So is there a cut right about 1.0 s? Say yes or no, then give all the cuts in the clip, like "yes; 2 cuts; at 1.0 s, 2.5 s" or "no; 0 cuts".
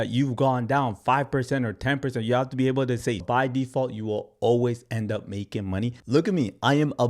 no; 2 cuts; at 3.2 s, 6.0 s